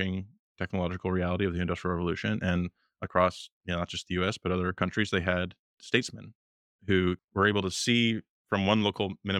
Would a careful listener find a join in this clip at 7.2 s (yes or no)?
yes